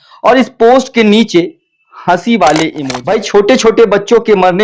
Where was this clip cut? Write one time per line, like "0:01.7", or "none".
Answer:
0:02.9